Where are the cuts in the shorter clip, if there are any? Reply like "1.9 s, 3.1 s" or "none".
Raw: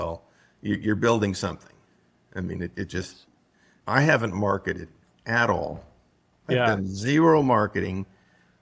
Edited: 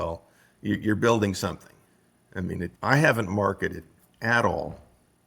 2.7 s